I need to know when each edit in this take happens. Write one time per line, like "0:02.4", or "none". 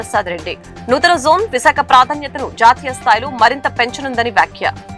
none